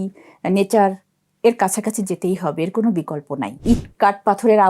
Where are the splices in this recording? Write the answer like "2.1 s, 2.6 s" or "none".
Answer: 3.6 s